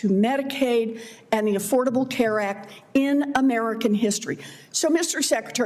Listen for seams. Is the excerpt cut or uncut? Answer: uncut